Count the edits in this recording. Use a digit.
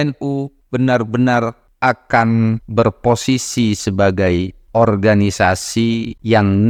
0